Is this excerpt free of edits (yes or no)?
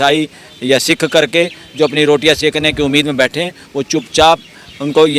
yes